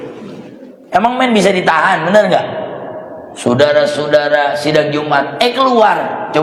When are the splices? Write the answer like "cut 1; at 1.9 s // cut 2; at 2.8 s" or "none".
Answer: none